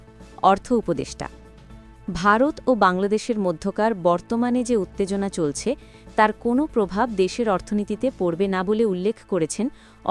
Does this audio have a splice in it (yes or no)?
no